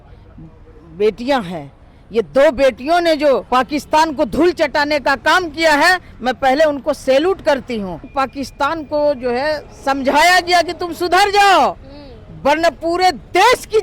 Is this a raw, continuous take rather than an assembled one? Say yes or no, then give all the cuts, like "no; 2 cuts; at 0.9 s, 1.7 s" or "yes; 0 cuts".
no; 2 cuts; at 3.4 s, 8.1 s